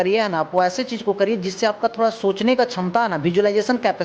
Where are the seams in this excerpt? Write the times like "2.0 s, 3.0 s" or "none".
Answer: none